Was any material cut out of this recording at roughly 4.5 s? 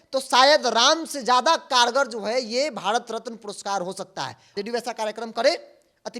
yes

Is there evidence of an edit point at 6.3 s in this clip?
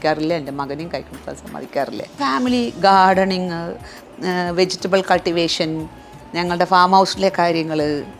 no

